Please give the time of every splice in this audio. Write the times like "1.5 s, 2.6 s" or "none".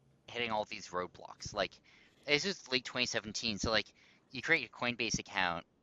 none